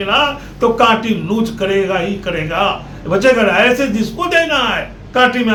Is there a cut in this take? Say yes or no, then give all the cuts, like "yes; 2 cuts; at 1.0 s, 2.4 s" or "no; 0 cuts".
no; 0 cuts